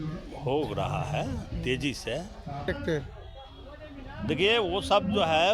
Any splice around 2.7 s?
yes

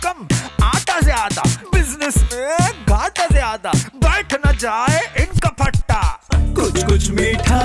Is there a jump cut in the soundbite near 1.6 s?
no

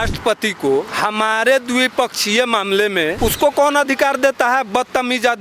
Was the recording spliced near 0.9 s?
yes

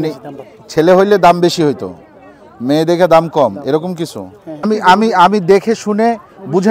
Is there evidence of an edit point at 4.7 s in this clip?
yes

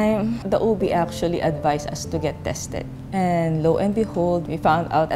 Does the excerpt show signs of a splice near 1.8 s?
no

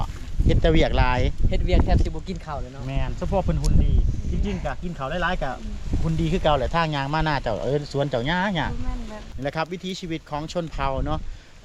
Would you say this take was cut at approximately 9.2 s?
yes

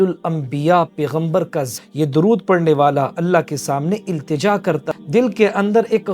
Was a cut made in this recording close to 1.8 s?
yes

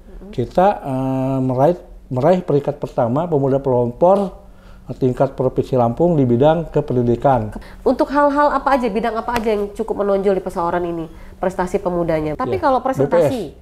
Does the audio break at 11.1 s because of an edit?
no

